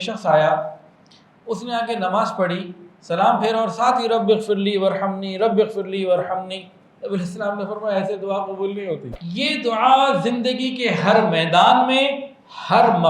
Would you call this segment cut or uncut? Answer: cut